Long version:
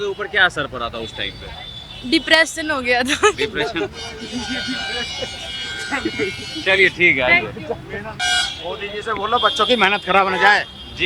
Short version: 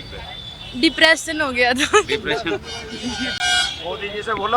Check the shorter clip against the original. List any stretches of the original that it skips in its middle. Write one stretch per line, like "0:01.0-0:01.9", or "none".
0:04.6-0:08.1